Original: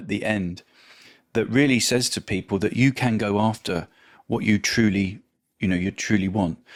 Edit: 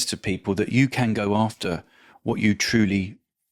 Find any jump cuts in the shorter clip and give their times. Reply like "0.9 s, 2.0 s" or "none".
none